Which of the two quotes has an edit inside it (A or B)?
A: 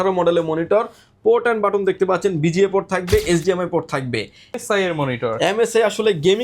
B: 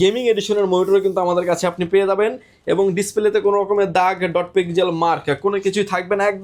A